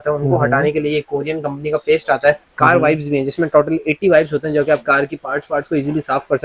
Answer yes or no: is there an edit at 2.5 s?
yes